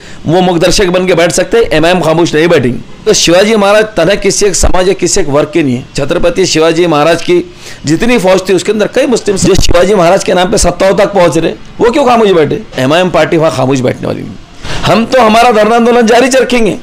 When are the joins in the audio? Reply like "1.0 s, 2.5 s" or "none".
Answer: 3.0 s, 5.9 s, 9.4 s, 12.7 s, 14.7 s

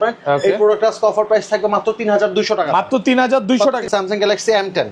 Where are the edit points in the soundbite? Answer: 3.9 s

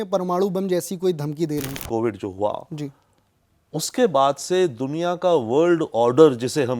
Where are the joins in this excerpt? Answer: 1.8 s

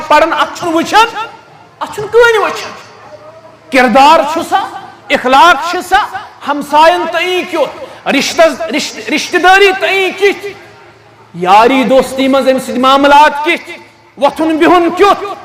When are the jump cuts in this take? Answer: none

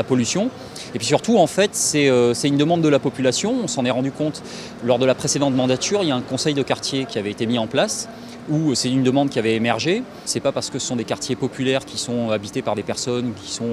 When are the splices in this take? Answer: none

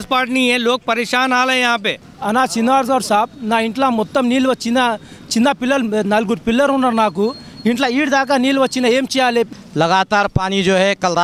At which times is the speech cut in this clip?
2.1 s, 9.6 s

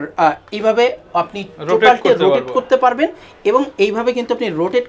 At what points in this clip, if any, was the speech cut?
none

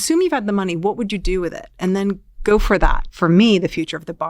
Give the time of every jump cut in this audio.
3.0 s

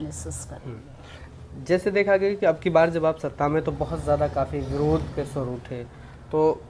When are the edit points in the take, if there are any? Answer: none

